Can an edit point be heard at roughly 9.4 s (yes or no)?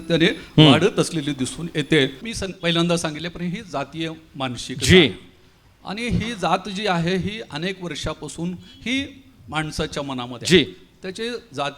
no